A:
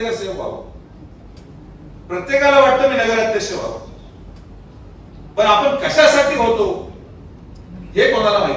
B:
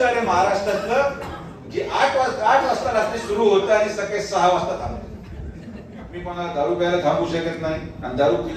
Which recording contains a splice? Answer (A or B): B